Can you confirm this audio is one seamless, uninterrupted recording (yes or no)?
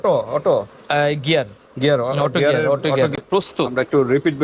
no